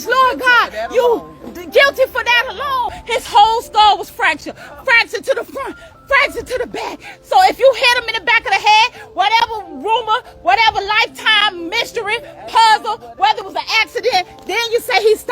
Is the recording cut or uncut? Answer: cut